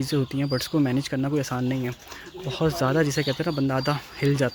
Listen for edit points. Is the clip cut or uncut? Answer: uncut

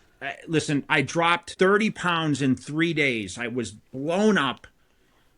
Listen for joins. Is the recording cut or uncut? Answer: cut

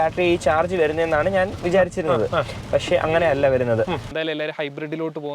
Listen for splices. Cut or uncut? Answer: cut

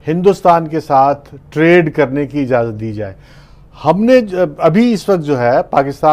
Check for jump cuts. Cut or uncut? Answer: cut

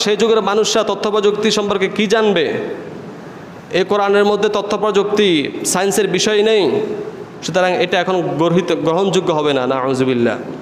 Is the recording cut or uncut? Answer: uncut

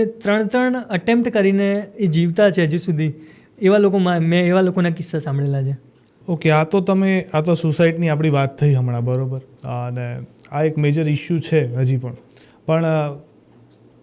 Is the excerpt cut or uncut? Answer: uncut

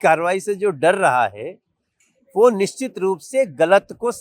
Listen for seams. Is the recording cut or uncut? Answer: uncut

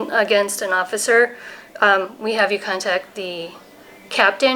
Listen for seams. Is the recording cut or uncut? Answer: uncut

